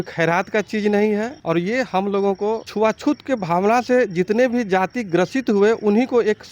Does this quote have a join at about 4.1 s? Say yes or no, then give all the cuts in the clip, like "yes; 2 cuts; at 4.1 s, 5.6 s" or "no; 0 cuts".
no; 2 cuts; at 1.3 s, 2.7 s